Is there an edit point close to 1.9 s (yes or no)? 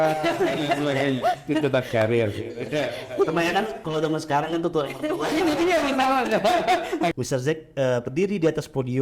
no